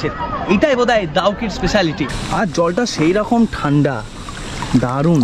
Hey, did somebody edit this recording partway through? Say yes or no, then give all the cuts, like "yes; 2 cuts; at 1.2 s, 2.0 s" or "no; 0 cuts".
yes; 1 cut; at 2.1 s